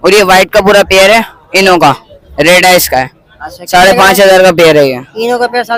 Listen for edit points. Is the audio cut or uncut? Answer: uncut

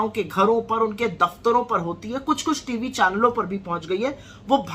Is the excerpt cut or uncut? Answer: uncut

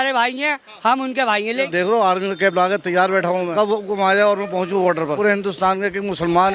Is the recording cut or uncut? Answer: cut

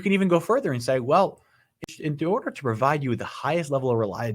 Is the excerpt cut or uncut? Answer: cut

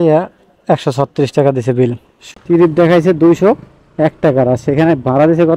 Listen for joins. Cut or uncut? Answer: cut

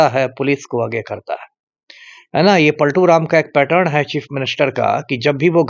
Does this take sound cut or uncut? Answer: uncut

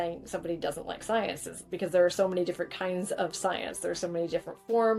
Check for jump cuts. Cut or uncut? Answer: uncut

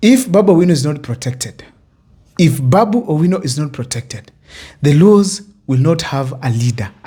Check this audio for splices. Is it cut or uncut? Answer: uncut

